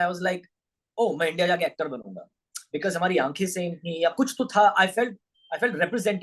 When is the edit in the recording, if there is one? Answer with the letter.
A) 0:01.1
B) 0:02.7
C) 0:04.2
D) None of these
D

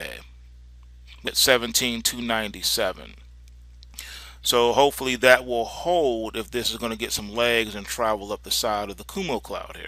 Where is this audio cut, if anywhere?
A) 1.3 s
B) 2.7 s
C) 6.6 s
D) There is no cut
D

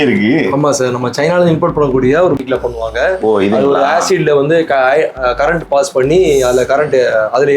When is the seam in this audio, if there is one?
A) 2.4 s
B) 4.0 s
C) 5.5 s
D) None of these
A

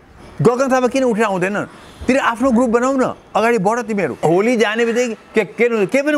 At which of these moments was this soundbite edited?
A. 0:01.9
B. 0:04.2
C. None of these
B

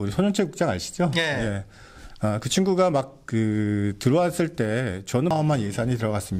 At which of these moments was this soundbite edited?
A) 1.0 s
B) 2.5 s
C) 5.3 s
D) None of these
C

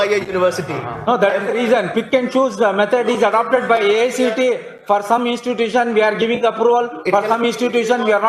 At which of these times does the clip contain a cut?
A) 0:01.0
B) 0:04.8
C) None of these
C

